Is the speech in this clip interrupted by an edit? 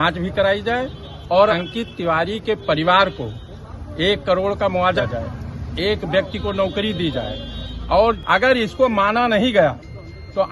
yes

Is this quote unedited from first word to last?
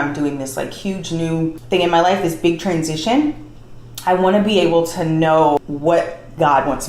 no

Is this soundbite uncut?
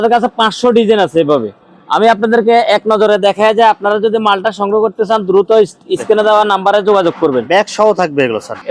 yes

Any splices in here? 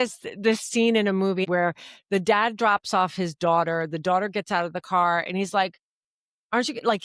yes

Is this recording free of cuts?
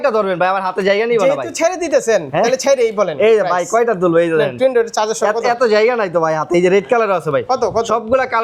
yes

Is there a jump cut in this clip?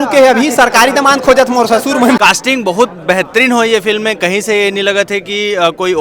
yes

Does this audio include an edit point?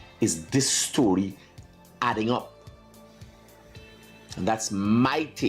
no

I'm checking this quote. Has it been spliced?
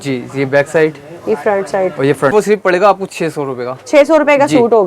yes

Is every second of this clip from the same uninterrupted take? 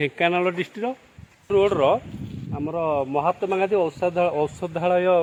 yes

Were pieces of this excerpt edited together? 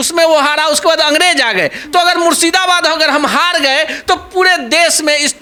no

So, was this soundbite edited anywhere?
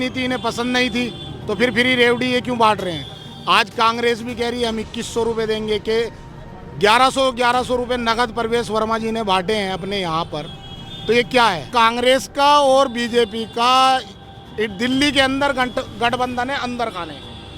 yes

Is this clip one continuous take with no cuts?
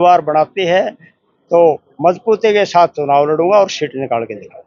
yes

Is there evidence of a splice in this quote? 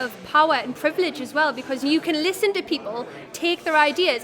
yes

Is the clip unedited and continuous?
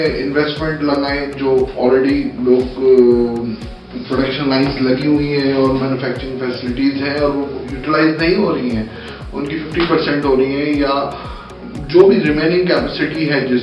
yes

